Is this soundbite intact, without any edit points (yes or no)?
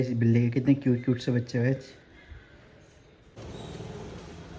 no